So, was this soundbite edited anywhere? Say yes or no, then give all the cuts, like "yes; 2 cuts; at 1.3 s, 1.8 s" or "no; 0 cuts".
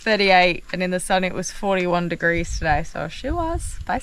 no; 0 cuts